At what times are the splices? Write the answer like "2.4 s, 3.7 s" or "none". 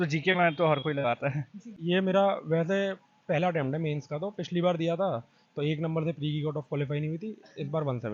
1.7 s